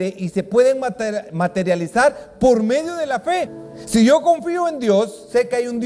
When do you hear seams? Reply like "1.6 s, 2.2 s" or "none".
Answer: 3.6 s